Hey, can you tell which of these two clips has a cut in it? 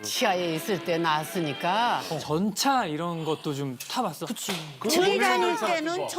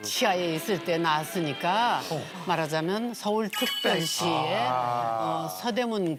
first; 1 cut; at 2.2 s

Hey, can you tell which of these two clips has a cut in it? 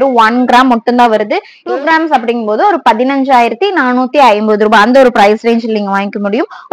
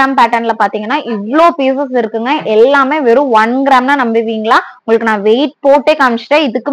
first; 1 cut; at 1.5 s

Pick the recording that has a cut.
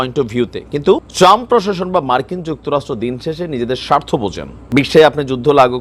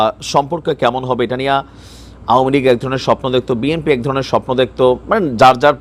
first; 2 cuts; at 1.1 s, 4.5 s

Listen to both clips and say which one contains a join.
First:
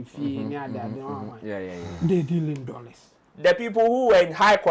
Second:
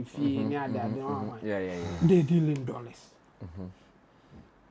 first; 1 cut; at 3.2 s

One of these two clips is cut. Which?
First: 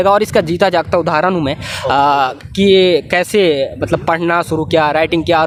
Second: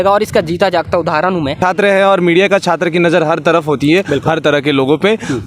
second; 1 cut; at 1.6 s

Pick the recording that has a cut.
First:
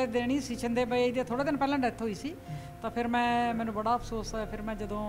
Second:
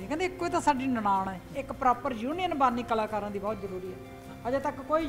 second; 1 cut; at 1.5 s

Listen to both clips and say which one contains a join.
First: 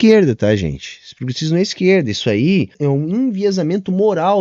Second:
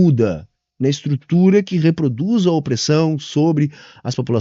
first; 1 cut; at 2.7 s

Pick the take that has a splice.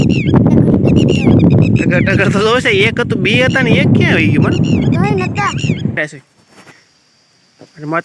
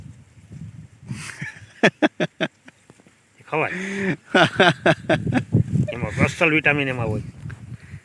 first; 1 cut; at 6.0 s

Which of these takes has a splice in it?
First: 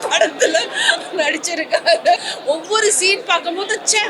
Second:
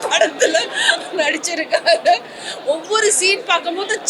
first; 1 cut; at 2.3 s

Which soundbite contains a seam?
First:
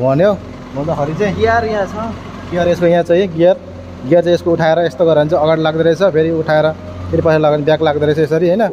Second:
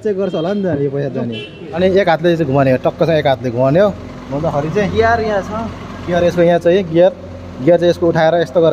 second; 1 cut; at 1.8 s

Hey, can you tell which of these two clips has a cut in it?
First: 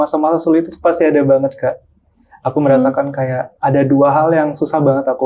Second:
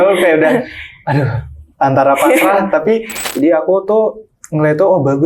second; 1 cut; at 3.2 s

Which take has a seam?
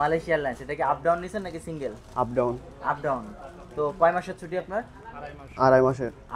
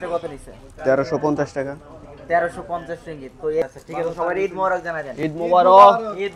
second; 1 cut; at 3.7 s

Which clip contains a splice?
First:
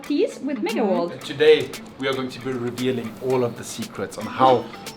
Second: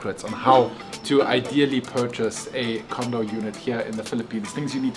first; 1 cut; at 1.2 s

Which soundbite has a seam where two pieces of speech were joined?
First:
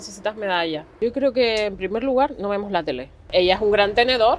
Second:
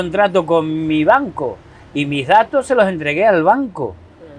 first; 2 cuts; at 0.9 s, 3.3 s

